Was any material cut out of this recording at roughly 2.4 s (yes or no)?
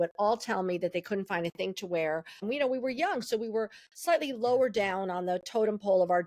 yes